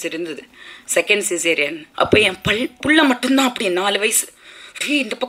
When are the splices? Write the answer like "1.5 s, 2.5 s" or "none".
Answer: 1.8 s